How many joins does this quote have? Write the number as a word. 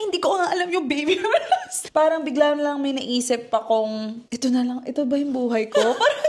two